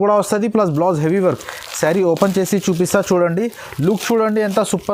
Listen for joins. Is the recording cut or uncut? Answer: uncut